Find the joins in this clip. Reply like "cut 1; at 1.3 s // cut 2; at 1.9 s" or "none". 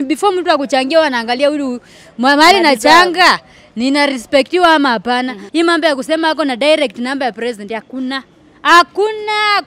cut 1; at 5.4 s